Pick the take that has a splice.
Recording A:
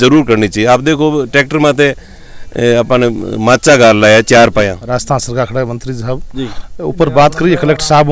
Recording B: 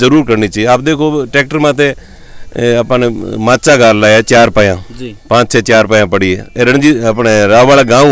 A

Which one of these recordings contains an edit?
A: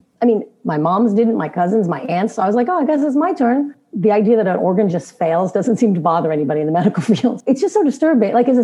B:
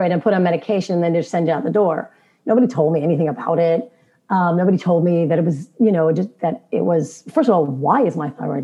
A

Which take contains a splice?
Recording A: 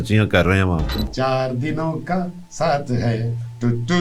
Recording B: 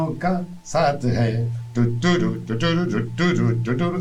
A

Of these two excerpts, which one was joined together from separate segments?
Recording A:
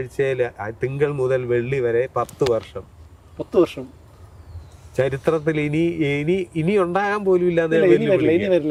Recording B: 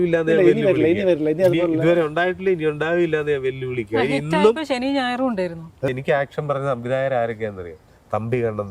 B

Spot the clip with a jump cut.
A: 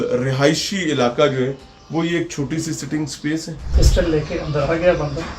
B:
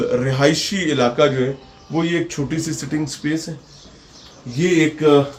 A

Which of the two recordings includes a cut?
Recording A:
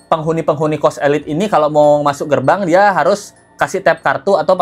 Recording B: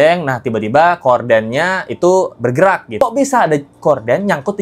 B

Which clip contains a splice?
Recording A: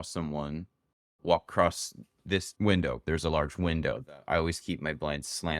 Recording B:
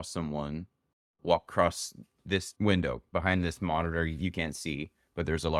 A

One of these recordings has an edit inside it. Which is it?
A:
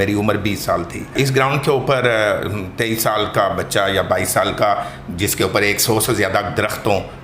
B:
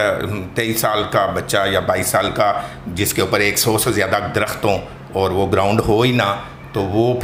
A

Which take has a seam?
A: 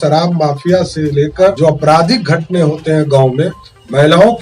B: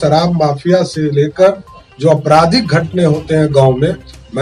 A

